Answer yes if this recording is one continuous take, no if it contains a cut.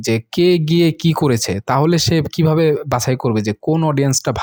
yes